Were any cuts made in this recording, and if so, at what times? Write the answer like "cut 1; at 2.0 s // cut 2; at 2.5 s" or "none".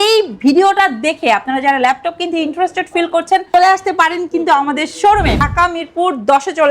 cut 1; at 5.5 s